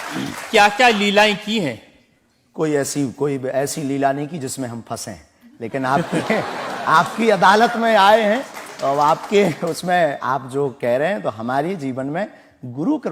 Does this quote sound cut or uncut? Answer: uncut